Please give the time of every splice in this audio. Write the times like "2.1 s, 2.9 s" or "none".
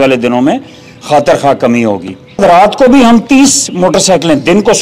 2.4 s